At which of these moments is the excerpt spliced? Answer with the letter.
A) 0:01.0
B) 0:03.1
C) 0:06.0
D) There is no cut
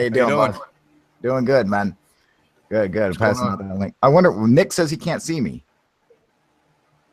B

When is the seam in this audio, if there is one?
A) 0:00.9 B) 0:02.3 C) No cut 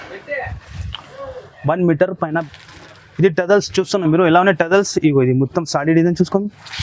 B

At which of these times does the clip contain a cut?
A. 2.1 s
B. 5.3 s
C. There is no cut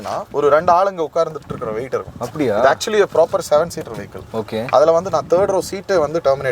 C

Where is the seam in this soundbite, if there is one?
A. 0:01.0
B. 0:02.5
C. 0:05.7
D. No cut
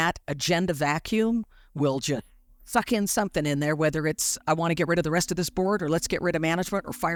D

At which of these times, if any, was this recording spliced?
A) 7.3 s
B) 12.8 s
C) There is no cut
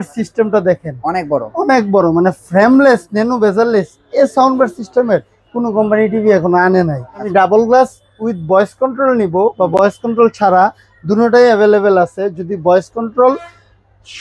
A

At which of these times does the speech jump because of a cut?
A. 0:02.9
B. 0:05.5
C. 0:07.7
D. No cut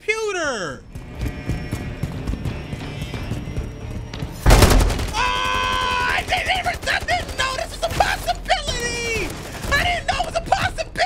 D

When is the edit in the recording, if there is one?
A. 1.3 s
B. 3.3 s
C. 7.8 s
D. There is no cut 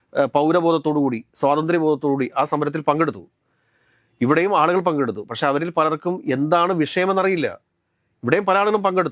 D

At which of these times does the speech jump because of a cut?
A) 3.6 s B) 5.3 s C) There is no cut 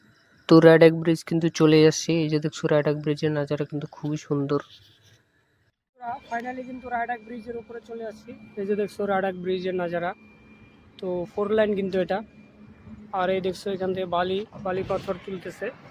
C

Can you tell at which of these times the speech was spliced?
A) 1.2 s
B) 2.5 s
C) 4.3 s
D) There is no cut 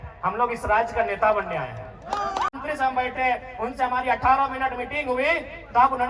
B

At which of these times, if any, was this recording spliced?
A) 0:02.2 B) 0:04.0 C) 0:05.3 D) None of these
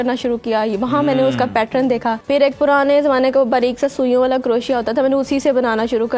A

